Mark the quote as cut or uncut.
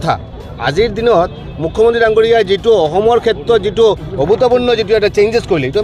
uncut